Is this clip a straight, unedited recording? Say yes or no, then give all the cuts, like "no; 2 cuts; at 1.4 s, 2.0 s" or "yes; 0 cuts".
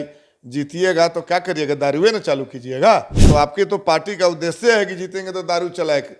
no; 1 cut; at 3.2 s